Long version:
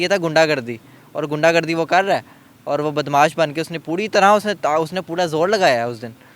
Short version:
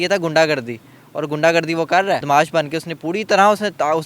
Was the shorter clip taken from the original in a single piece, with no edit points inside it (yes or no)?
no